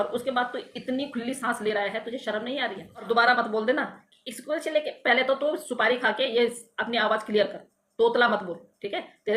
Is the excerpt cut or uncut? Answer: cut